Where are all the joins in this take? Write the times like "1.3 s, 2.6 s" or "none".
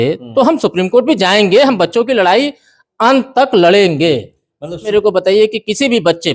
4.8 s

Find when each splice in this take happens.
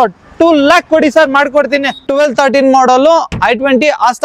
2.1 s

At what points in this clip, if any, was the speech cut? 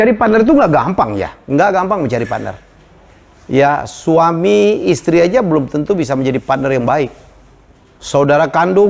none

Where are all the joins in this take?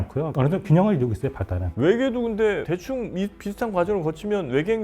1.6 s

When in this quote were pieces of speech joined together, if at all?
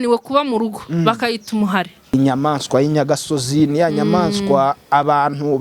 2.1 s

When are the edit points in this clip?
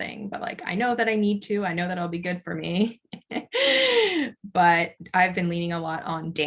5.0 s

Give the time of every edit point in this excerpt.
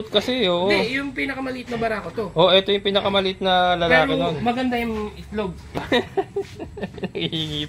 5.8 s

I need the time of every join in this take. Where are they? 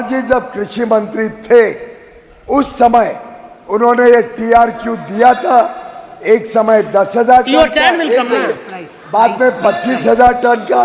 none

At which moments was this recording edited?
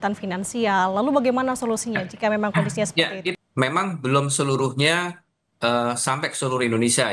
3.4 s

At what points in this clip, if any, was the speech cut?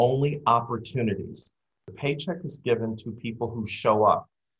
1.8 s

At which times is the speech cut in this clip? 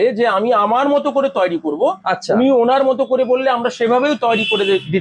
none

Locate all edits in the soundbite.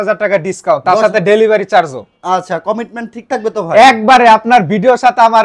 none

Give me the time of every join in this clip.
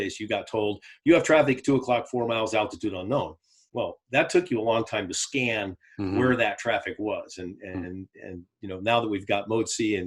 none

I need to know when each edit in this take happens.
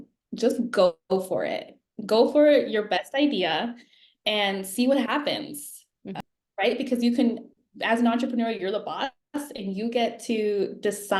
6.1 s

